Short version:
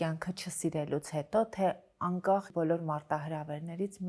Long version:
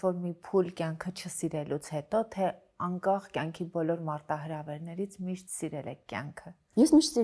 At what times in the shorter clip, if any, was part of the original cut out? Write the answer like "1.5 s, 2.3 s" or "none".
2.5 s